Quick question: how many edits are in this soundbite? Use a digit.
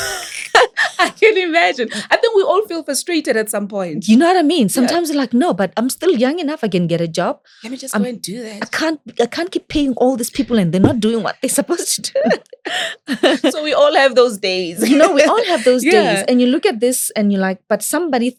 0